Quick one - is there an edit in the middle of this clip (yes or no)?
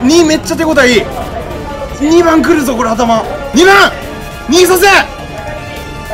yes